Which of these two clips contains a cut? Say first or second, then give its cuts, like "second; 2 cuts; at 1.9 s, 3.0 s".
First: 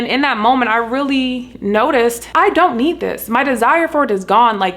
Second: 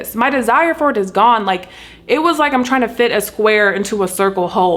first; 1 cut; at 2.2 s